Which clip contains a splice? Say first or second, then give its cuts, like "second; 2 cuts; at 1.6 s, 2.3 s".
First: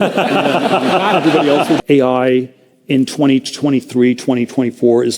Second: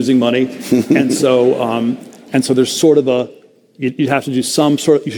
first; 1 cut; at 1.8 s